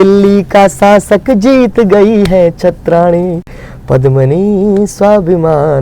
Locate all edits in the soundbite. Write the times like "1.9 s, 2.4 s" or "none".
none